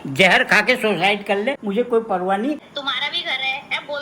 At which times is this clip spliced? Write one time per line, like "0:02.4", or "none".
0:01.6
0:02.6